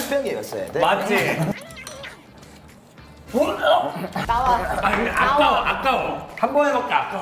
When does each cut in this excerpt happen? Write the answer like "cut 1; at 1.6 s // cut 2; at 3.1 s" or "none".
cut 1; at 1.6 s